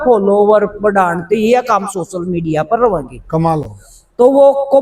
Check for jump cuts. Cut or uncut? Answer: uncut